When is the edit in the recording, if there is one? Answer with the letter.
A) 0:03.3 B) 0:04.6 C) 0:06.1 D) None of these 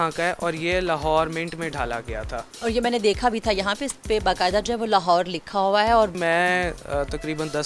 C